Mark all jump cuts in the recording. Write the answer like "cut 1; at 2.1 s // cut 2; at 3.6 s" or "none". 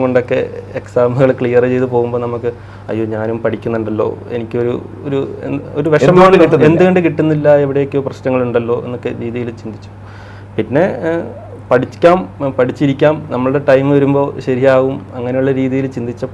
none